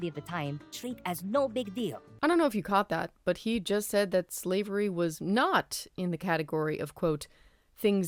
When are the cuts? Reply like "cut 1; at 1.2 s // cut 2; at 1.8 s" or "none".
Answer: none